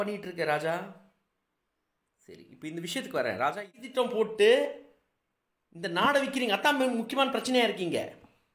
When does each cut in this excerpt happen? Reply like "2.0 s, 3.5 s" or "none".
3.8 s